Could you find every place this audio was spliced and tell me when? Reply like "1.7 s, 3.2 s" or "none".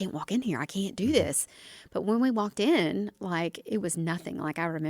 none